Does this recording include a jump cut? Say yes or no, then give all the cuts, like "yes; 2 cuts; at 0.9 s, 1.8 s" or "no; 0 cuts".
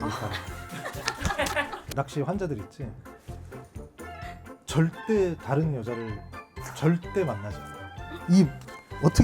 yes; 1 cut; at 1.9 s